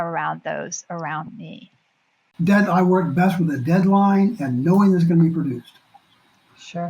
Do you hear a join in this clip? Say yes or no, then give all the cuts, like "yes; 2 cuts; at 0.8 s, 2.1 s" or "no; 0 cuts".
yes; 1 cut; at 2.2 s